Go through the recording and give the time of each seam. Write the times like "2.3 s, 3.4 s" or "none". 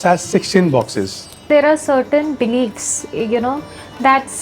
1.5 s